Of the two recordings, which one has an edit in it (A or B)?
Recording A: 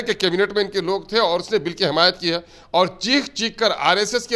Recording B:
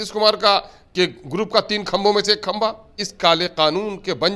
B